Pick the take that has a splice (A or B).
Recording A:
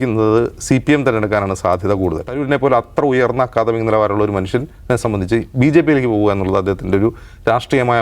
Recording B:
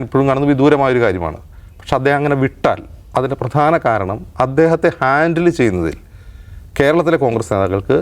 A